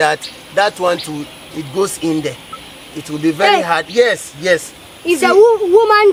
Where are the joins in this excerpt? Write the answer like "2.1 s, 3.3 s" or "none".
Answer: none